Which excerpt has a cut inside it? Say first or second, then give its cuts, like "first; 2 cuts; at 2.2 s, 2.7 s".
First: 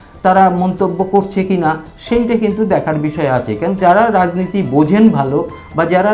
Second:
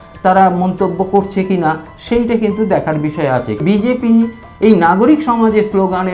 second; 1 cut; at 3.6 s